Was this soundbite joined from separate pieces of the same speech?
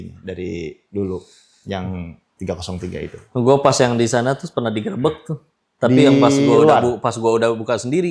no; 0 cuts

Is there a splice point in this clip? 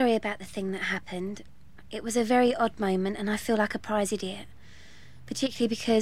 yes; 1 cut; at 4.9 s

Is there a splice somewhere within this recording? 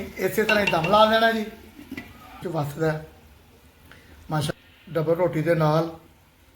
yes; 2 cuts; at 2.4 s, 4.5 s

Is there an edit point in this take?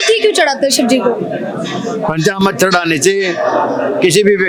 no; 0 cuts

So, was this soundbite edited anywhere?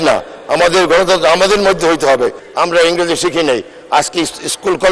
yes; 1 cut; at 2.4 s

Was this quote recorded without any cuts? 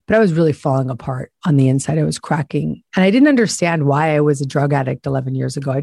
no; 1 cut; at 2.8 s

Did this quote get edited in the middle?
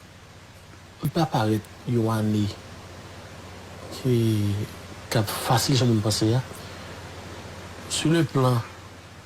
yes; 1 cut; at 1.0 s

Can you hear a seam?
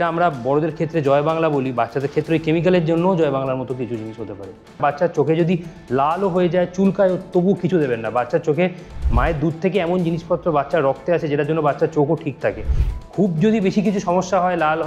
yes; 1 cut; at 4.8 s

